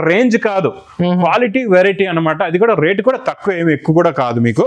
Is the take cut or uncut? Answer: uncut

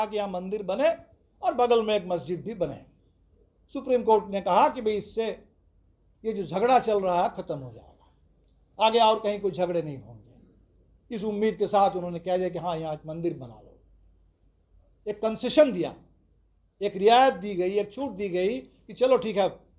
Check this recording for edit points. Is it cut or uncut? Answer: uncut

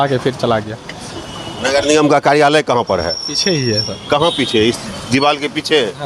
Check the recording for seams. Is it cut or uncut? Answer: cut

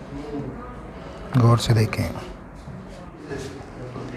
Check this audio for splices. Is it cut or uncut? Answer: cut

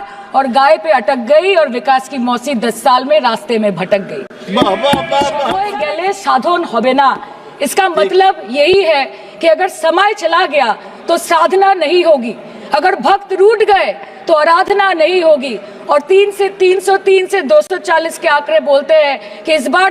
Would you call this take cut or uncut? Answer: cut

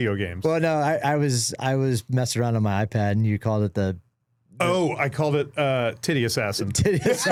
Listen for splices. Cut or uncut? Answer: uncut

